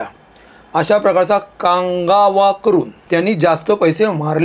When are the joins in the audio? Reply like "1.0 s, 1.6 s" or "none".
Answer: 3.0 s